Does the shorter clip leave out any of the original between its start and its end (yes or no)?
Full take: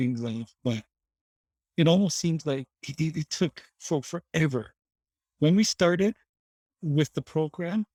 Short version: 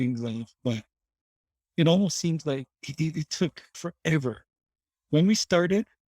yes